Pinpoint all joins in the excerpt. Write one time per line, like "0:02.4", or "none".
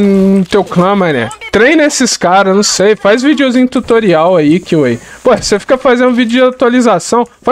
none